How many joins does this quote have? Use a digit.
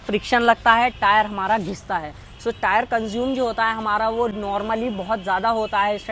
0